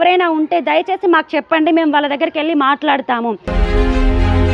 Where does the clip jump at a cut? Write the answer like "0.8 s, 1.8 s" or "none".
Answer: none